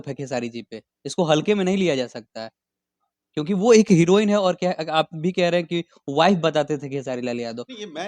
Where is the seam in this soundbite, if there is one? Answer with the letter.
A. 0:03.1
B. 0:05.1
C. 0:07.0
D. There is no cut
D